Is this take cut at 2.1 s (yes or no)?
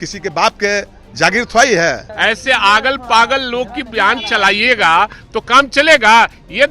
yes